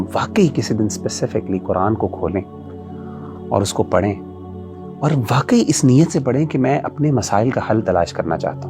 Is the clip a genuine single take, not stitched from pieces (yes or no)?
yes